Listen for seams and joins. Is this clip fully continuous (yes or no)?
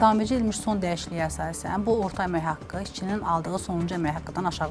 yes